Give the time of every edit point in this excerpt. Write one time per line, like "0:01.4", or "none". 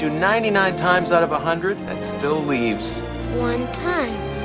0:01.8